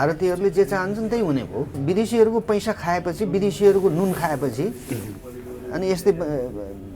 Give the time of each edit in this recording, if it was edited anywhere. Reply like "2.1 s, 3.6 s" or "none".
1.8 s